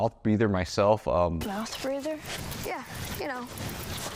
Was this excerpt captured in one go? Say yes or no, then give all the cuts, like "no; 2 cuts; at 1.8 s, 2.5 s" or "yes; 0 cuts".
yes; 0 cuts